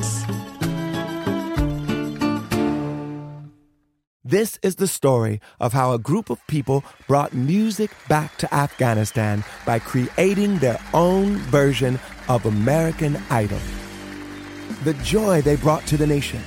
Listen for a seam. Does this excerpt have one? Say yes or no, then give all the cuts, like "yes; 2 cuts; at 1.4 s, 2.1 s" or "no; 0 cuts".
yes; 1 cut; at 4.1 s